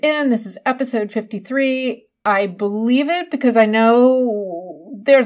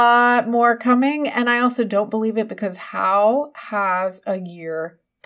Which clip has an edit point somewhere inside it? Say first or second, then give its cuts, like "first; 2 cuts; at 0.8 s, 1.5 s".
first; 1 cut; at 2.2 s